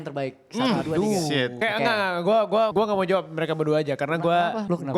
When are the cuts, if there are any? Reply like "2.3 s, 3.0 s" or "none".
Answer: 1.6 s